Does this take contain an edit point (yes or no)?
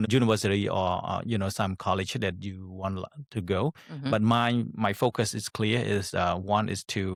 no